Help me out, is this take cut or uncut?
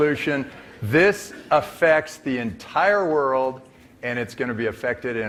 uncut